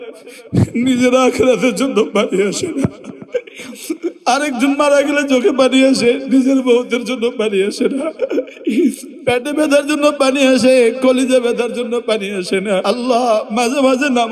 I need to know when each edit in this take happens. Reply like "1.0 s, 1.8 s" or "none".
8.1 s, 12.8 s